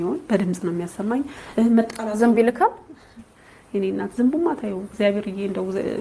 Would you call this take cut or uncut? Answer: uncut